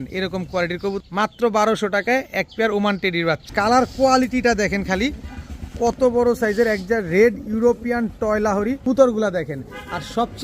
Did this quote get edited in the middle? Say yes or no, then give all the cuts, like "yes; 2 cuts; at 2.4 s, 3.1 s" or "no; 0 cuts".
yes; 3 cuts; at 1.0 s, 3.4 s, 8.9 s